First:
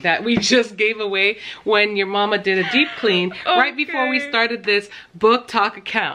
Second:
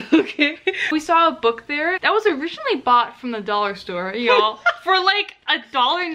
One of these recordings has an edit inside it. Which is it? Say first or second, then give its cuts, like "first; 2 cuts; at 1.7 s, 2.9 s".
second; 2 cuts; at 0.9 s, 2.0 s